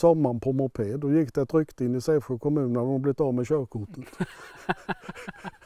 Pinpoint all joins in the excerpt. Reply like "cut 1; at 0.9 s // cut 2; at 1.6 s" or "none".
none